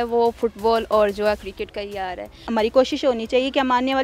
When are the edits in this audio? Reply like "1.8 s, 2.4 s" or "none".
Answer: 2.4 s